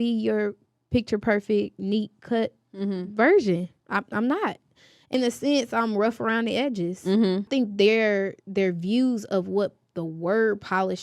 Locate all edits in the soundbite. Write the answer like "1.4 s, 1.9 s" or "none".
5.1 s, 7.5 s

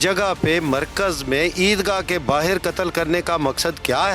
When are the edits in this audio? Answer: none

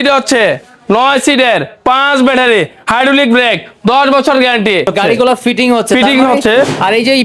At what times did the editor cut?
4.9 s

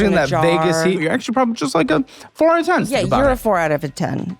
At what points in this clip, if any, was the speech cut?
1.0 s, 2.9 s

